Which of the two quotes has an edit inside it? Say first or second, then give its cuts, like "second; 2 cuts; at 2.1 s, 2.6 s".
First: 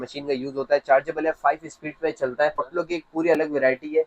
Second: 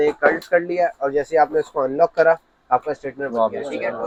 first; 1 cut; at 2.7 s